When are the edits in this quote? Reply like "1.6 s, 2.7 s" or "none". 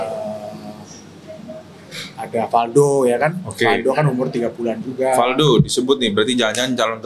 none

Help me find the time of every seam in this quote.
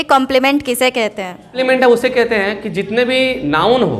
1.5 s

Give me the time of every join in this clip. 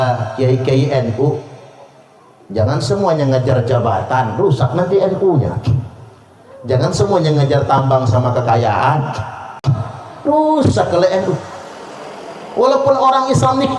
9.7 s

